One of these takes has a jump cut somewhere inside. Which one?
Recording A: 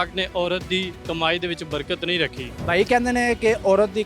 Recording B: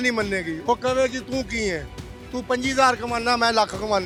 A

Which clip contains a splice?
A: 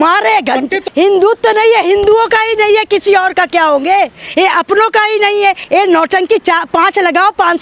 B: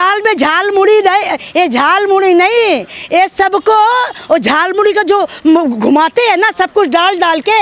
A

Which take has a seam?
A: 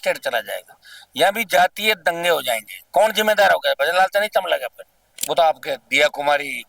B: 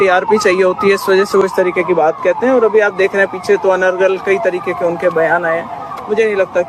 A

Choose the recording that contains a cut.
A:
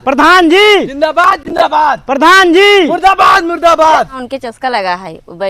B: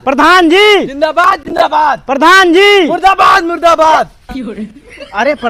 A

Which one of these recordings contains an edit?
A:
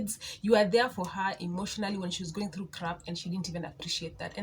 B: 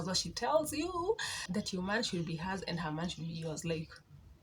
B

